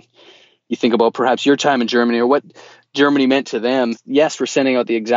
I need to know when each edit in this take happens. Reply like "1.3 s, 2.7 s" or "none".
4.0 s